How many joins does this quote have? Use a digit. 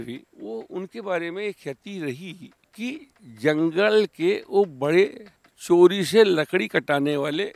0